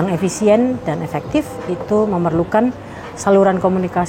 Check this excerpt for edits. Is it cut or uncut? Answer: uncut